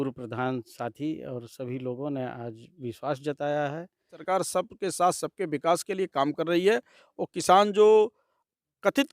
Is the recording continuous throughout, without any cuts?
no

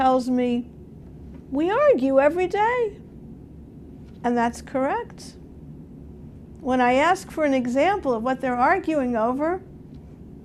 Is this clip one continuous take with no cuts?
yes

